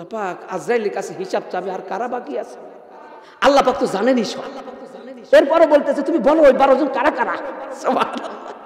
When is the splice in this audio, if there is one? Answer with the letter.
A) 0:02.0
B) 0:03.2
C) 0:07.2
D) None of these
B